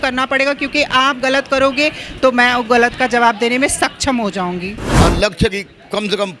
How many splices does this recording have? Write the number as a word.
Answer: one